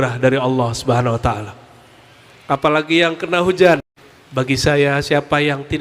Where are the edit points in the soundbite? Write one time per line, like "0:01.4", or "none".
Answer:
0:03.9